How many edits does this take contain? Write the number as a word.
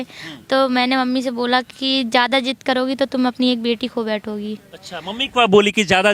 zero